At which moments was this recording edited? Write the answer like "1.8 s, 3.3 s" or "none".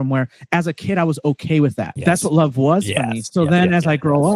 1.9 s